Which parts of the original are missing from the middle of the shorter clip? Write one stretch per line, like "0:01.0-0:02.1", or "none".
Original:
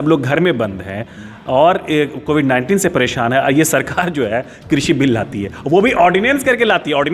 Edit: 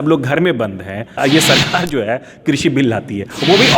0:01.2-0:03.4